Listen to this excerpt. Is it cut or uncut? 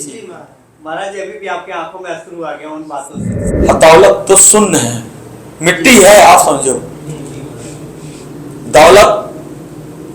cut